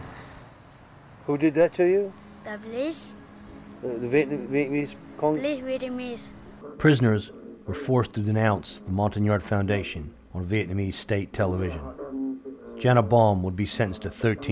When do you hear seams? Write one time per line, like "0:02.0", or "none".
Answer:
0:06.7